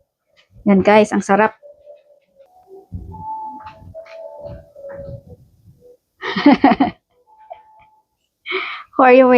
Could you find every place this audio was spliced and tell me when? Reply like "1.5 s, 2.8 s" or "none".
none